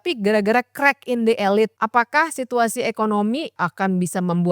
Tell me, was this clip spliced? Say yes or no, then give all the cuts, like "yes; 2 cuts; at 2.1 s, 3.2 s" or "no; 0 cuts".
yes; 2 cuts; at 1.7 s, 3.6 s